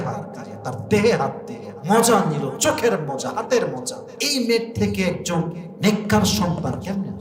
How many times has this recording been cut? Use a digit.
0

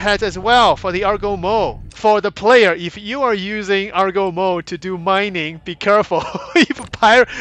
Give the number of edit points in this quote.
1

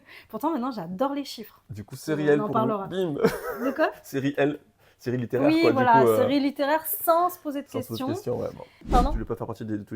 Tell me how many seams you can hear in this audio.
1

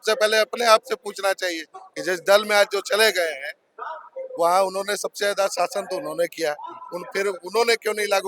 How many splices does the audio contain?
0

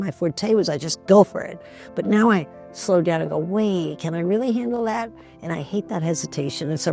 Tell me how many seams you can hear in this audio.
0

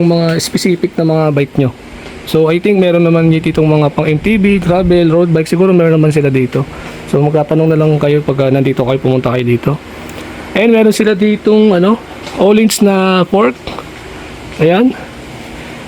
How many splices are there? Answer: 0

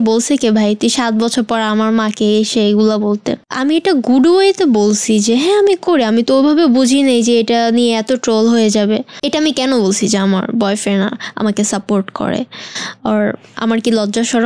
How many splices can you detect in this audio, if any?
2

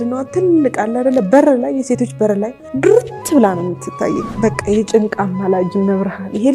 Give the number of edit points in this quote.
2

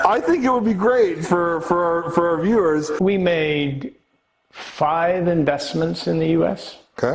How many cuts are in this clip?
1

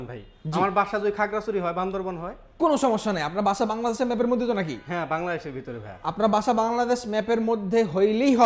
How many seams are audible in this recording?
0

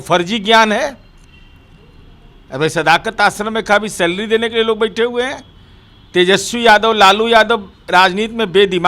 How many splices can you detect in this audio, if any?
0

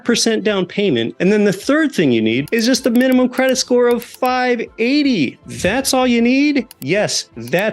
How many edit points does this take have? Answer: 4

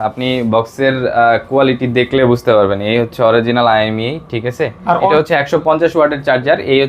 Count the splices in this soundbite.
1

